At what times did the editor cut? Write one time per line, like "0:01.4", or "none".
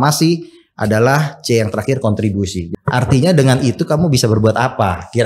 0:02.6

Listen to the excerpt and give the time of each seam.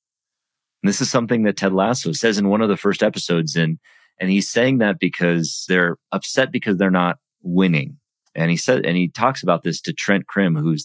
0:02.1
0:05.6

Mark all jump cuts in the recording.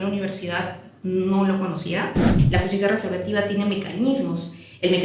0:02.3

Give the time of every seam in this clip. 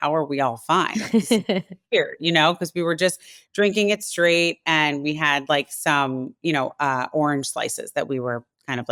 none

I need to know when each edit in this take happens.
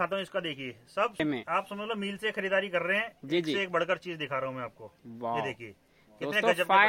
0:01.2

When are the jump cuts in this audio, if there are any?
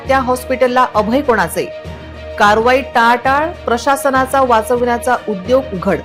none

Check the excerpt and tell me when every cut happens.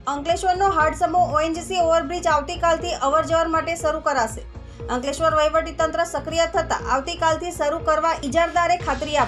0:08.2

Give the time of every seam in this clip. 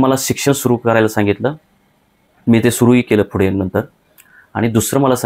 none

